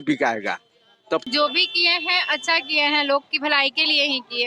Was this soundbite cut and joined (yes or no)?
yes